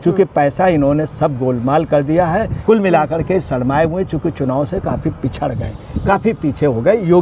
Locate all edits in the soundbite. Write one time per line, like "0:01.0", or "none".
0:02.5